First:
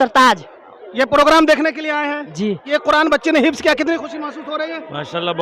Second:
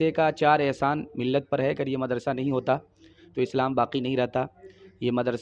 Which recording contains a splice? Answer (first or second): first